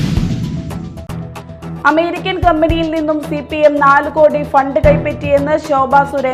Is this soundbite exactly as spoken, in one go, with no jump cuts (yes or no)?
no